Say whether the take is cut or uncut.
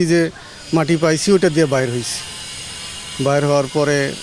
uncut